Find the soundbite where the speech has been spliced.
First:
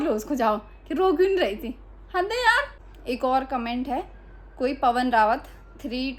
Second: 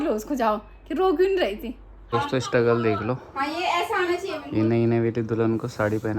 second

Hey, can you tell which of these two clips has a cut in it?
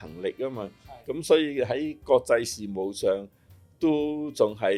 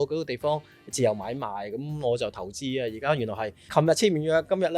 second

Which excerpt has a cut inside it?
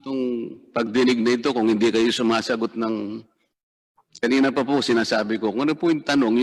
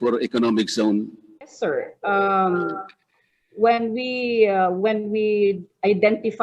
second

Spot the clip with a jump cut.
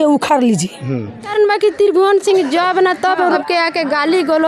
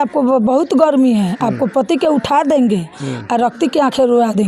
first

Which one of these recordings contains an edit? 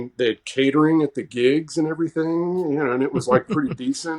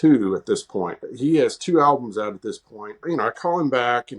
second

